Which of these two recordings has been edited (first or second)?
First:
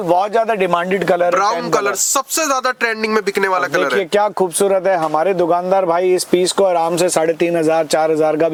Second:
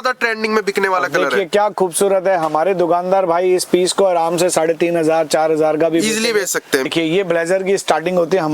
second